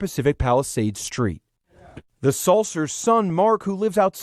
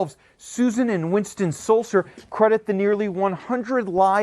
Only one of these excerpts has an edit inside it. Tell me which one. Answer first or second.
first